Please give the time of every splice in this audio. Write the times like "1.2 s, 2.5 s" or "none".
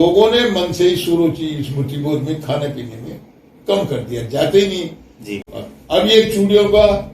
5.3 s